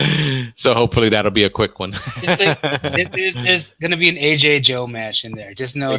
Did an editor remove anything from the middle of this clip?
no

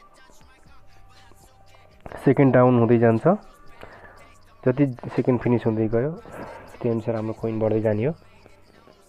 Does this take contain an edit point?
no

